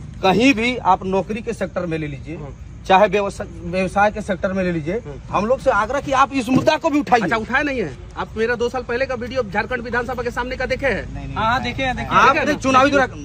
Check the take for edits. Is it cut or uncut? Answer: uncut